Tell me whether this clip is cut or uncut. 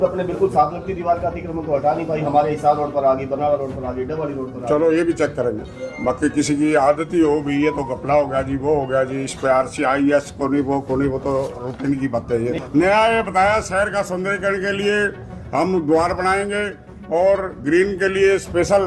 cut